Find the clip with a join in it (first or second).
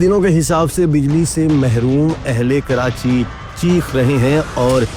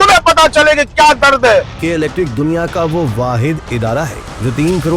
second